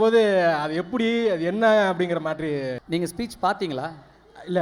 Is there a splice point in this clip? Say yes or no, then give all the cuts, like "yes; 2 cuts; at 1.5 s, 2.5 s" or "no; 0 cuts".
yes; 1 cut; at 2.8 s